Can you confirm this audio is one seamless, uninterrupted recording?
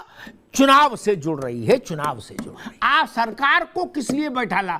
no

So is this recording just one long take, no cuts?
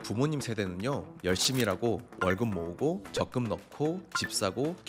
no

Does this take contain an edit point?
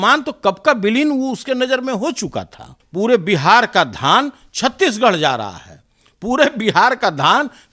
yes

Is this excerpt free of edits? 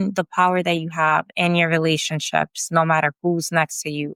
yes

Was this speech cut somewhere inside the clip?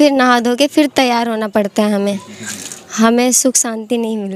no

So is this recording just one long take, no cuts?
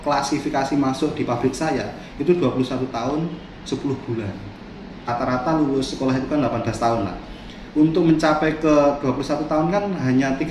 no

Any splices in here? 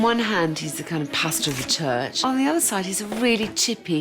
yes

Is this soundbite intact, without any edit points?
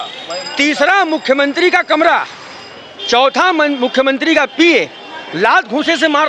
yes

